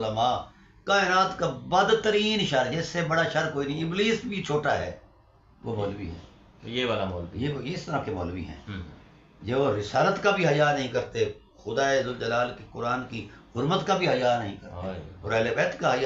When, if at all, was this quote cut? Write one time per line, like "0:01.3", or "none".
none